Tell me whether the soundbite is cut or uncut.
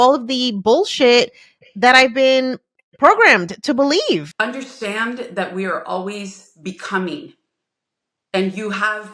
cut